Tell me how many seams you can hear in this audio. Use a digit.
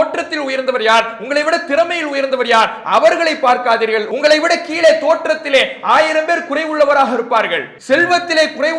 2